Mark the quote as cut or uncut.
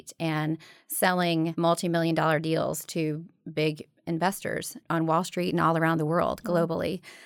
cut